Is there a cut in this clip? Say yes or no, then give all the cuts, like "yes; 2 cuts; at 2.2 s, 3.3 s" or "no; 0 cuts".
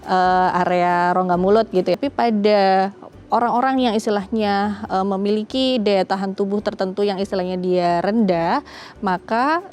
yes; 1 cut; at 2.0 s